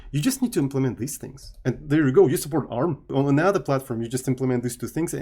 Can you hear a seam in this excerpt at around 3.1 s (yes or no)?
yes